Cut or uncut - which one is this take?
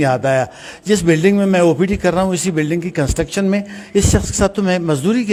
uncut